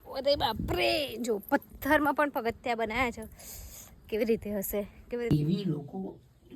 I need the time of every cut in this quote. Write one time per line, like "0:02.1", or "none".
0:05.3